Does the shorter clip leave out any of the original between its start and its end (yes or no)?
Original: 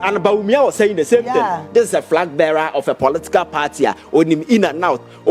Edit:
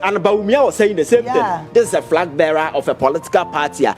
no